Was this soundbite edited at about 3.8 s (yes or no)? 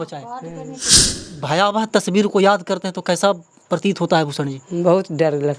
no